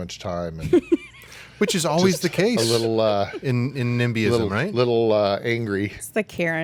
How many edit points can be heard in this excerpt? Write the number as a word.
zero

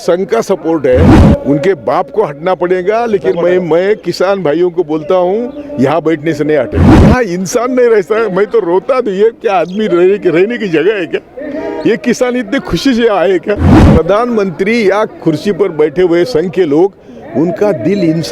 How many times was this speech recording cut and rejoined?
three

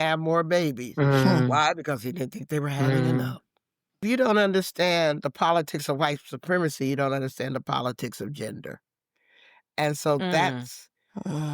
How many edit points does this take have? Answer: one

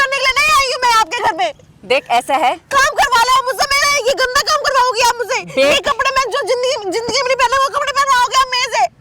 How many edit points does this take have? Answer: zero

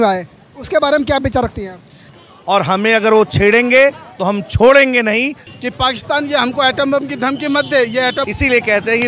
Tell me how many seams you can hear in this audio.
three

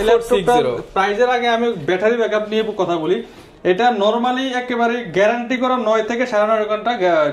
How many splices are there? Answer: zero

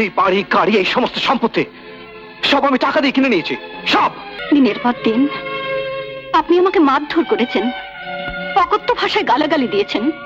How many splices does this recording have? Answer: one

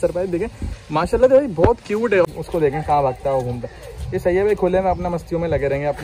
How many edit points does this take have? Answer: one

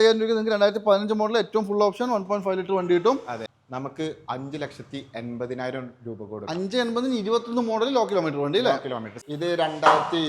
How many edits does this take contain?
two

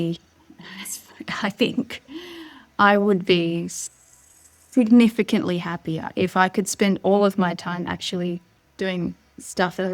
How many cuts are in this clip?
one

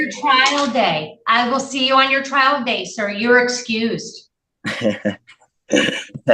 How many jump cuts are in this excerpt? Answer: zero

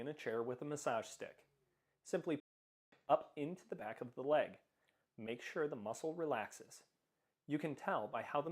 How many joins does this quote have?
one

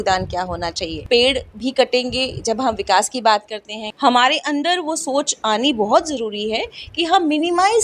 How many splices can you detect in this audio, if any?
two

